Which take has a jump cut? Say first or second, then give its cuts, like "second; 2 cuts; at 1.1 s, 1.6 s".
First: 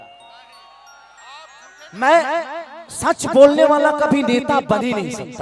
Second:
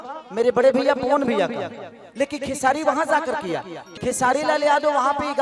second; 1 cut; at 3.8 s